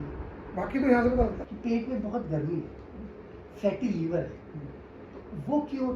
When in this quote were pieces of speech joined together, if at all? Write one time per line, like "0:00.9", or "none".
0:01.4